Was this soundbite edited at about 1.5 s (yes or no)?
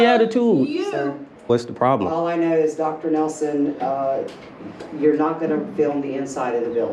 yes